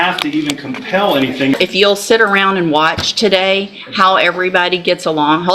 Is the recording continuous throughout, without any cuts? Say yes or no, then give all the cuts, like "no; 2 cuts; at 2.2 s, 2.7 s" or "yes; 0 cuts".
no; 1 cut; at 1.5 s